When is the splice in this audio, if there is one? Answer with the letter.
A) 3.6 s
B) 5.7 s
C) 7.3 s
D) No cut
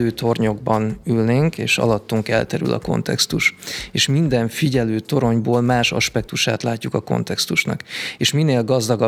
D